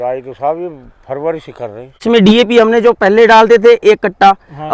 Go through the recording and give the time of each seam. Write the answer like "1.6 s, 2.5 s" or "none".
2.0 s